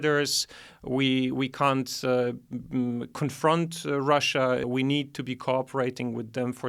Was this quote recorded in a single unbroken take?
no; 1 cut; at 4.7 s

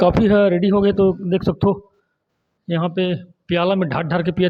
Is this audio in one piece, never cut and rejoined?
yes; 0 cuts

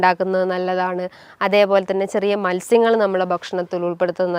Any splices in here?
no; 0 cuts

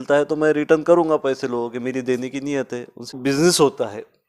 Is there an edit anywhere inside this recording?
yes; 1 cut; at 3.2 s

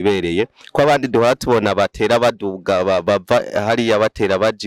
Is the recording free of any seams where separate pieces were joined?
yes; 0 cuts

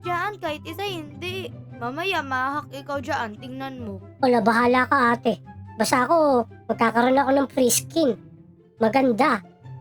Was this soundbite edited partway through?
no; 0 cuts

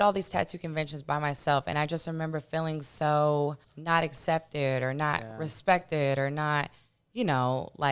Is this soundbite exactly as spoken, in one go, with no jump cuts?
no; 1 cut; at 3.7 s

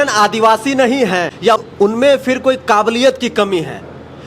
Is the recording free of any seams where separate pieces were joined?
no; 1 cut; at 1.6 s

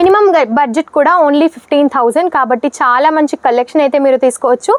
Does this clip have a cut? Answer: no; 0 cuts

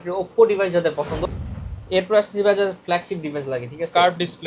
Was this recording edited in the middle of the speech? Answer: yes; 1 cut; at 1.2 s

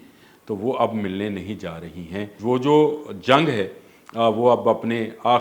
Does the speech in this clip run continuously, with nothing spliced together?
no; 1 cut; at 2.3 s

